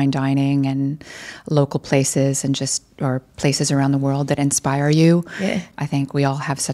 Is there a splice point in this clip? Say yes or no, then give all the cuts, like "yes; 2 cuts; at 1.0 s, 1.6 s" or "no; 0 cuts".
no; 0 cuts